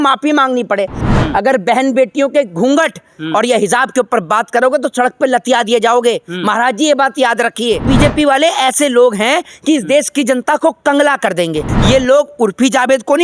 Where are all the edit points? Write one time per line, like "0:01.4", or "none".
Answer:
0:01.0
0:07.8
0:11.7